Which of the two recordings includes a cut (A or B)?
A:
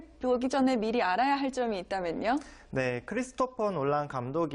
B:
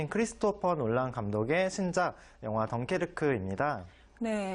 A